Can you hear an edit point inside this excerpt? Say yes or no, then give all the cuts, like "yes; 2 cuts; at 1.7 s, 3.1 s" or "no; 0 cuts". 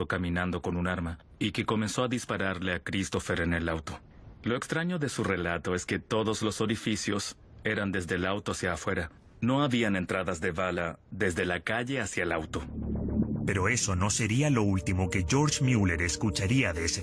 yes; 1 cut; at 3.9 s